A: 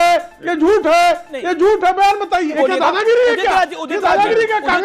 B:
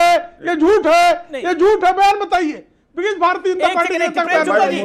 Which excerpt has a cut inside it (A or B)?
A